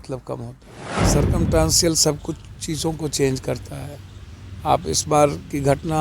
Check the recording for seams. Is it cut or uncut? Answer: cut